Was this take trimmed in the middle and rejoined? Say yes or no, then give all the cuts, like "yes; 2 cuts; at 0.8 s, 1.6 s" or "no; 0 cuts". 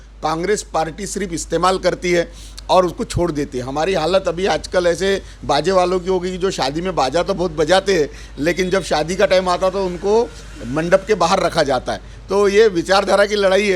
no; 0 cuts